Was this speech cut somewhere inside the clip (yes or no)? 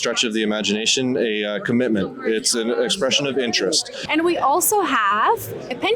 yes